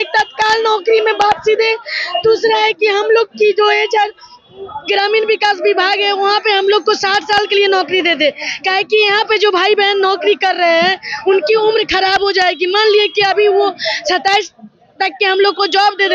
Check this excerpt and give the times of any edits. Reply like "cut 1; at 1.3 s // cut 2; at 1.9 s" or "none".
none